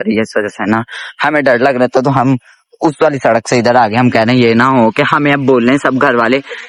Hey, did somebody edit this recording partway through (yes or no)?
no